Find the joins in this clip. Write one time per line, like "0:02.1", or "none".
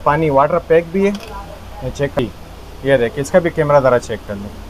0:02.2